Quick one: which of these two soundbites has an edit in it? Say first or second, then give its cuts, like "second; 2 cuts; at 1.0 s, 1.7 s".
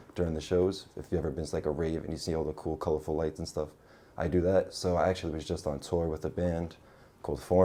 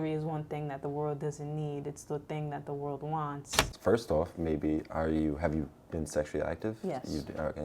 second; 1 cut; at 3.6 s